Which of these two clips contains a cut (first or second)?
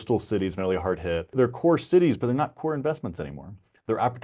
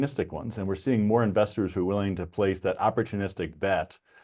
first